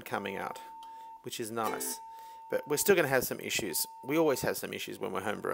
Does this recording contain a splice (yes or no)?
no